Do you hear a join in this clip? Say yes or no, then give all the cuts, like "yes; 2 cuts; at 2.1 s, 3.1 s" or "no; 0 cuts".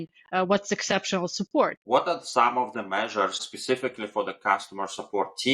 yes; 2 cuts; at 1.8 s, 3.5 s